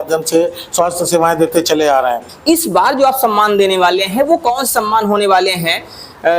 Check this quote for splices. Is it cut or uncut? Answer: cut